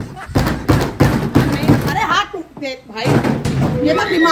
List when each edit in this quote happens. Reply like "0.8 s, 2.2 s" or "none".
none